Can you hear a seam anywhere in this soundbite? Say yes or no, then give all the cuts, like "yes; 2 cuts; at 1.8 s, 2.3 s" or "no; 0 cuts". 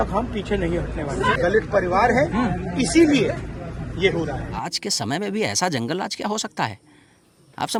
no; 0 cuts